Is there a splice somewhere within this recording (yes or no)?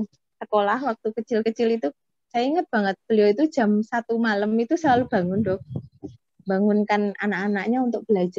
no